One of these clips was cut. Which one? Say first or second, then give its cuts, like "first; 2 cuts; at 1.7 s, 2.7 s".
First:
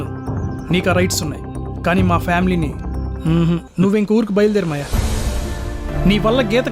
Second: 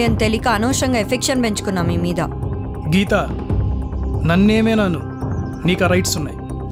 first; 2 cuts; at 3.7 s, 5.9 s